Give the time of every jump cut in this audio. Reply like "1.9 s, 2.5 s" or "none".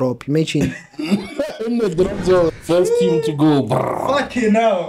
2.5 s